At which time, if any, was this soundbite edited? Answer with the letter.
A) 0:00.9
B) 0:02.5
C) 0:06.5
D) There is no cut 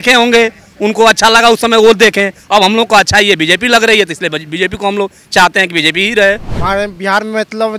C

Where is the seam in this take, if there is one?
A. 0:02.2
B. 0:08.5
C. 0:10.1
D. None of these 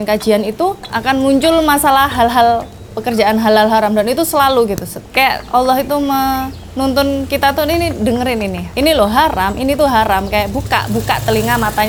D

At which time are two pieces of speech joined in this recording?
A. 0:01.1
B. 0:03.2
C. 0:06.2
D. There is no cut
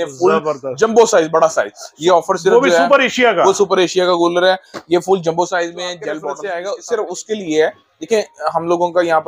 C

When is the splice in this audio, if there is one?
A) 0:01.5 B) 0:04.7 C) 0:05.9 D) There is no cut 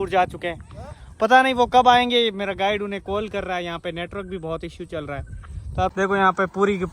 C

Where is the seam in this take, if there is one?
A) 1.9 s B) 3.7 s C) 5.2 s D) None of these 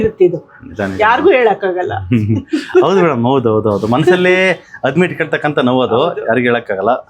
D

